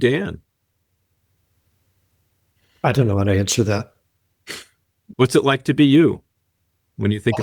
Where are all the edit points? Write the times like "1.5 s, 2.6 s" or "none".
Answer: 5.1 s